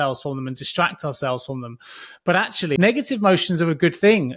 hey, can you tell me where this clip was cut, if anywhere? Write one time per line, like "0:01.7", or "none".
0:02.8